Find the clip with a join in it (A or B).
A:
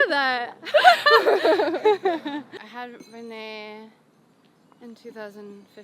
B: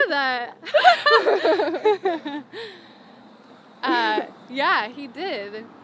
A